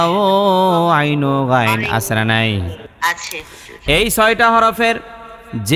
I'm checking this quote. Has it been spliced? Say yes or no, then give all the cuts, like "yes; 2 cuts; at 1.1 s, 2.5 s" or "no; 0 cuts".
yes; 1 cut; at 2.8 s